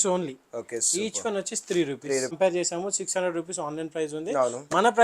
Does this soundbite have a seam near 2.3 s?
yes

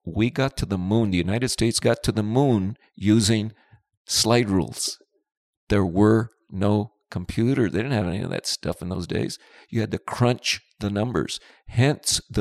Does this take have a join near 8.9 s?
no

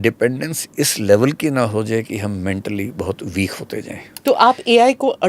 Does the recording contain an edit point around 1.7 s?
no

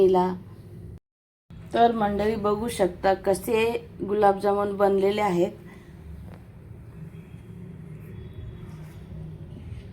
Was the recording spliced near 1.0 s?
yes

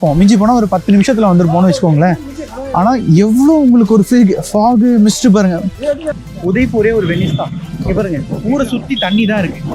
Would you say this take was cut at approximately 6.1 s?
yes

